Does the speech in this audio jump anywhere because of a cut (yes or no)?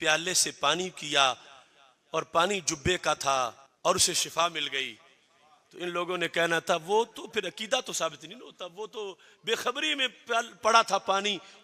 no